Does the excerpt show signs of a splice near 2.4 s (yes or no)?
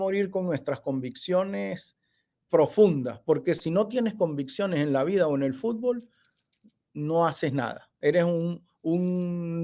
no